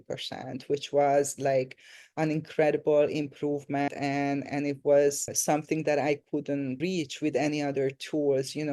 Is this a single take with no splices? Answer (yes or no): no